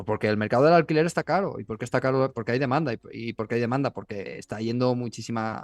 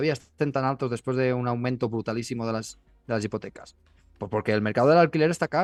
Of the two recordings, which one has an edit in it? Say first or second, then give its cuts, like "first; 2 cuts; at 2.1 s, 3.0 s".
first; 1 cut; at 4.3 s